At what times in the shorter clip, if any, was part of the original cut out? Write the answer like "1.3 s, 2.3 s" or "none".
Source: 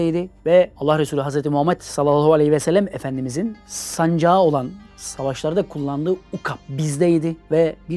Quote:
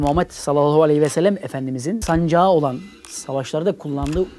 2.0 s